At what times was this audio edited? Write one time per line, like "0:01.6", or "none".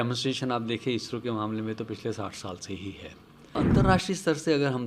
0:03.5